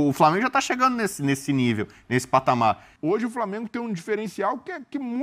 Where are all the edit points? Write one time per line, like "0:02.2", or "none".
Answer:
0:02.9